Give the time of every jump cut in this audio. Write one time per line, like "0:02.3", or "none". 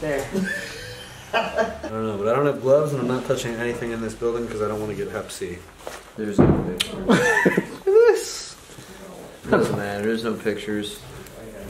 0:01.8